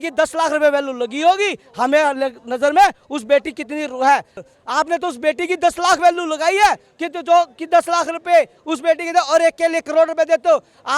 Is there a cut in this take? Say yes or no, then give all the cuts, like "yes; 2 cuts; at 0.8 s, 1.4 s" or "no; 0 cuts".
yes; 1 cut; at 4.3 s